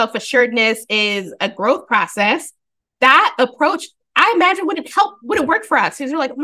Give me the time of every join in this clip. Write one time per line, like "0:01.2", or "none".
none